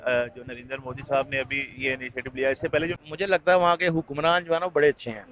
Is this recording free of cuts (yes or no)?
no